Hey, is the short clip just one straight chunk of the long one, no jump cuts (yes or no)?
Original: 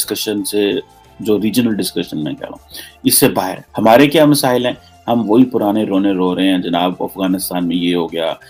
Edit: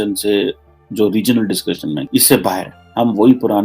no